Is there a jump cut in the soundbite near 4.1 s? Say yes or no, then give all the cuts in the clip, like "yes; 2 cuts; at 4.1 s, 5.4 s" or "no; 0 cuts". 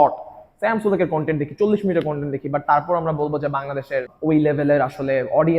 yes; 1 cut; at 4.1 s